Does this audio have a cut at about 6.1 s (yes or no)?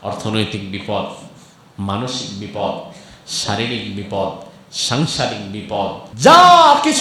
yes